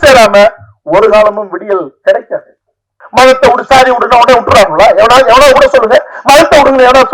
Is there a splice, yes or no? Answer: yes